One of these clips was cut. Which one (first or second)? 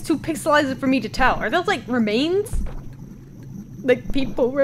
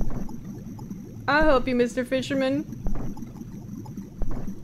second